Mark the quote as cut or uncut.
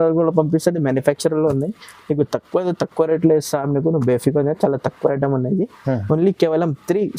uncut